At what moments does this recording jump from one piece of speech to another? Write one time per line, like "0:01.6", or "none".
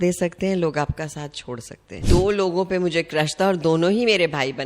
0:01.9